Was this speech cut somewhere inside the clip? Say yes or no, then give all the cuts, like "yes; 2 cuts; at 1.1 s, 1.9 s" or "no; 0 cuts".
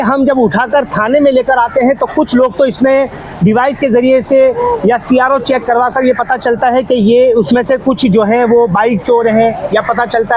no; 0 cuts